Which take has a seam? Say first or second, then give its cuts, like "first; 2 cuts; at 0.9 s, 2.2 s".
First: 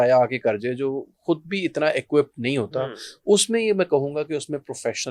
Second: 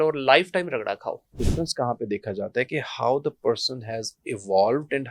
second; 1 cut; at 1.4 s